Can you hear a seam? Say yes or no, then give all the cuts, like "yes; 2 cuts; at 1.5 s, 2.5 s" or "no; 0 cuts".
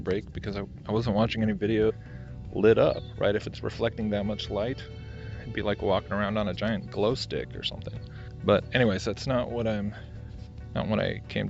no; 0 cuts